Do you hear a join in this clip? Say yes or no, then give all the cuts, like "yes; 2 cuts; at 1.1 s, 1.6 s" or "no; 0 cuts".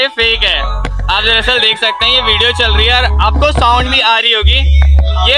no; 0 cuts